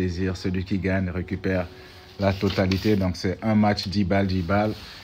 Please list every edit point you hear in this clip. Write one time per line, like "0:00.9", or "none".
none